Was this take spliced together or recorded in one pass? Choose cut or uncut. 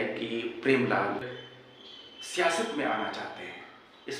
cut